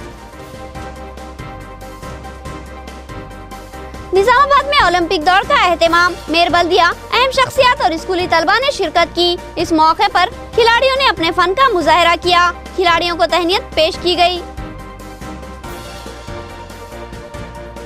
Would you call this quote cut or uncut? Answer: uncut